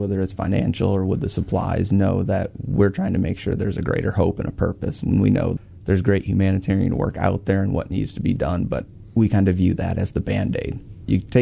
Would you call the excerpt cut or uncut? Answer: uncut